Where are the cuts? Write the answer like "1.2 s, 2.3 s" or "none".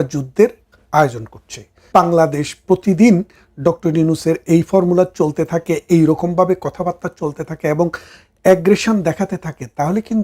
1.9 s